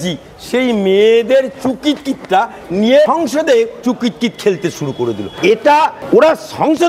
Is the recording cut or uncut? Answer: cut